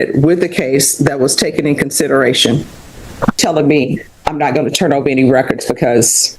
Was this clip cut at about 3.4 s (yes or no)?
yes